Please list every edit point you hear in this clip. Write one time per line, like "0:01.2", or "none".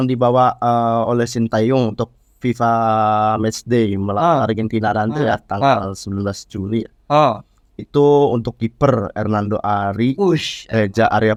none